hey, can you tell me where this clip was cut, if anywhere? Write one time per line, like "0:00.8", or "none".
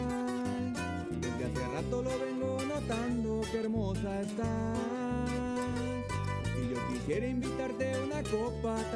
none